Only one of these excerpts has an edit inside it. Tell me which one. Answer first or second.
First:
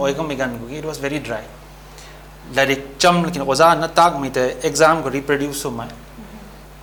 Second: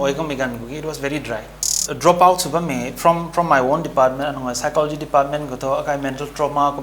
second